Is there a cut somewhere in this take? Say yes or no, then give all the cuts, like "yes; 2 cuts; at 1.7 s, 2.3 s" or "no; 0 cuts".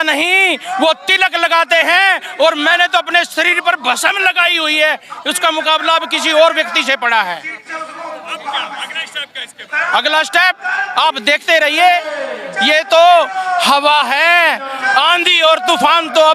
no; 0 cuts